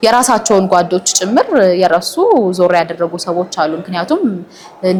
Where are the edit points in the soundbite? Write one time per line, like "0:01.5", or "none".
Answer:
none